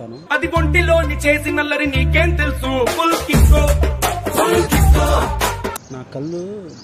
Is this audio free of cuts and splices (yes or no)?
no